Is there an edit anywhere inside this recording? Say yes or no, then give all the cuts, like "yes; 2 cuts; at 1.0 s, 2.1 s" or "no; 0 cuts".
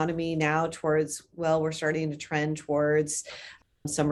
no; 0 cuts